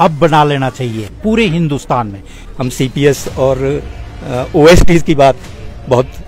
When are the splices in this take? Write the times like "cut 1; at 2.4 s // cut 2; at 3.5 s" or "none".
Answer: cut 1; at 2.4 s